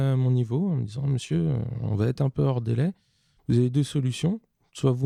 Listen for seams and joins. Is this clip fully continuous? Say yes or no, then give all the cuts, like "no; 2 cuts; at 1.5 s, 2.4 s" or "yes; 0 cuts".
yes; 0 cuts